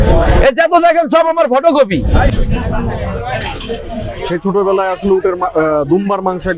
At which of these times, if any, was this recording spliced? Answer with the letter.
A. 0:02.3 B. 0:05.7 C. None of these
A